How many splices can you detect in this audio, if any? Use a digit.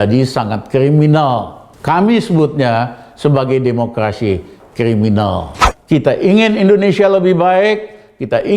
1